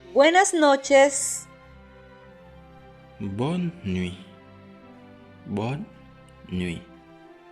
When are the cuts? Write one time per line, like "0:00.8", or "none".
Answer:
0:01.2